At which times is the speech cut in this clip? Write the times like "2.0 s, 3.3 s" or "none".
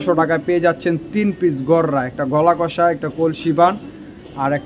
none